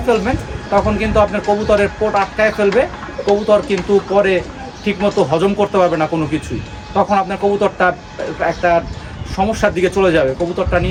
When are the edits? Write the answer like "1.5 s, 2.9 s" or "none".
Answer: none